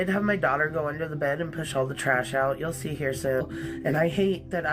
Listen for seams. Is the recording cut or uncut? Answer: cut